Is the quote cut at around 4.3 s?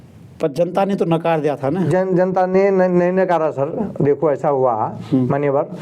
no; 0 cuts

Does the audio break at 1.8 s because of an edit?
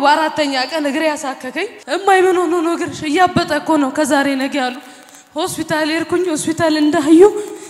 yes; 1 cut; at 1.8 s

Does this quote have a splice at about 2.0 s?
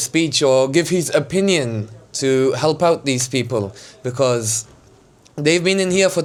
no; 0 cuts

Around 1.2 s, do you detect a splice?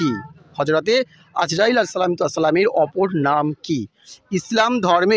no; 1 cut; at 4.1 s

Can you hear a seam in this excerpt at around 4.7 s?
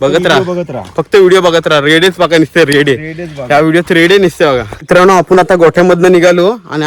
yes; 1 cut; at 4.7 s

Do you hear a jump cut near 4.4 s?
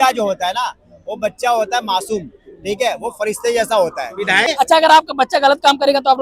yes; 1 cut; at 4.4 s

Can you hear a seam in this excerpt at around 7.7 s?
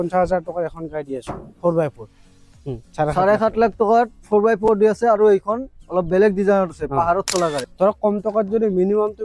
yes; 2 cuts; at 2.6 s, 7.7 s

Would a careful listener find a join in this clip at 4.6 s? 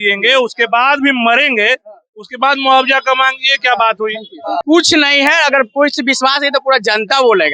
yes; 1 cut; at 4.6 s

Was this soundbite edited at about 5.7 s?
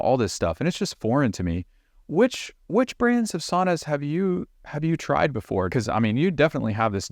yes; 1 cut; at 5.7 s

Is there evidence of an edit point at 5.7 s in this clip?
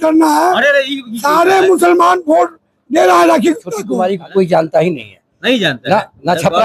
no; 1 cut; at 3.8 s

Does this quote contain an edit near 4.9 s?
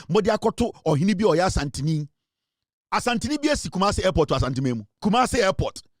yes; 1 cut; at 4.9 s

